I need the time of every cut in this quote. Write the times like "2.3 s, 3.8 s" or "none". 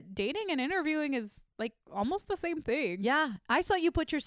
none